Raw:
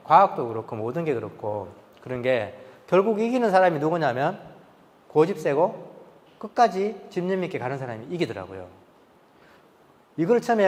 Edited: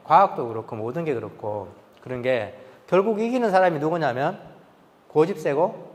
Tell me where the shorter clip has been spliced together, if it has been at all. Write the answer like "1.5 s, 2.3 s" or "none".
none